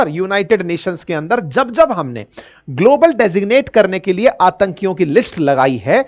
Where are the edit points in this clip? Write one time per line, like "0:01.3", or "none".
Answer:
none

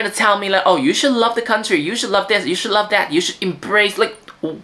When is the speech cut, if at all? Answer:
none

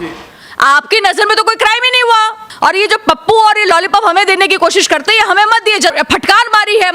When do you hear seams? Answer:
0:02.4
0:05.9

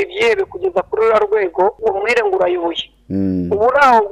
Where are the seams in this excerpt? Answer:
0:01.8

